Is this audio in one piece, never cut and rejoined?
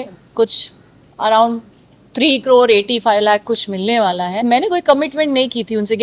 no; 1 cut; at 4.4 s

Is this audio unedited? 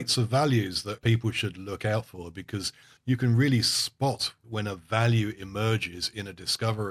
no; 3 cuts; at 1.0 s, 2.9 s, 4.4 s

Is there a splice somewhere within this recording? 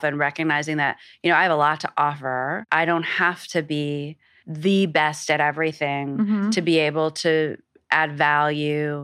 yes; 1 cut; at 2.6 s

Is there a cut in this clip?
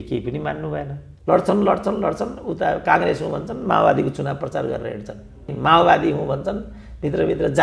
yes; 2 cuts; at 1.0 s, 5.5 s

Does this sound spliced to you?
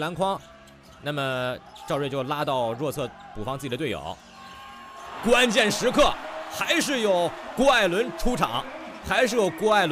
no; 0 cuts

